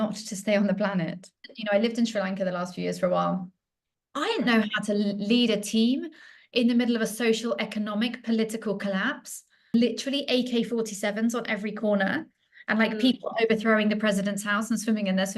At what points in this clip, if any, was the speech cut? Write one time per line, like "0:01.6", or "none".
0:01.5